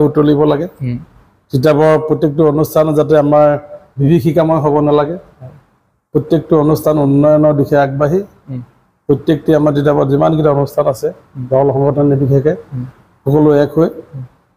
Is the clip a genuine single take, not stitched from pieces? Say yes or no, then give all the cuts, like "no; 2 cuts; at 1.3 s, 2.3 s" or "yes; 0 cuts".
yes; 0 cuts